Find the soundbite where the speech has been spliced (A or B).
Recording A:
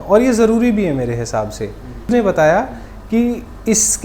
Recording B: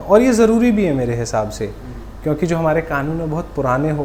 A